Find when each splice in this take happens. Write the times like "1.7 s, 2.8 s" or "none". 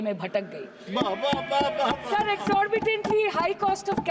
none